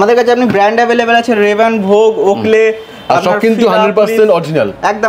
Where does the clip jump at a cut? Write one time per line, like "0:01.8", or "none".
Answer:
none